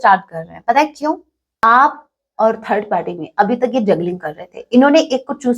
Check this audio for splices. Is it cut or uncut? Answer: cut